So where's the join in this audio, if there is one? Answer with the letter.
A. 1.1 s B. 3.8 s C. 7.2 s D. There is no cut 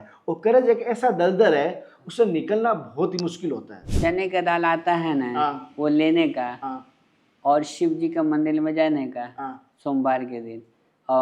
B